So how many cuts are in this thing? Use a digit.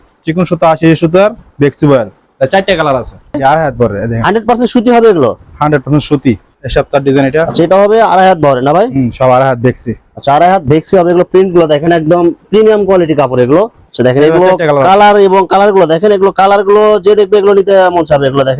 3